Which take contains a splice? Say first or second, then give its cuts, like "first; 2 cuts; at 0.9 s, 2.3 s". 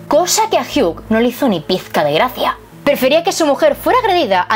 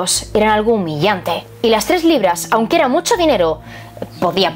first; 1 cut; at 2.7 s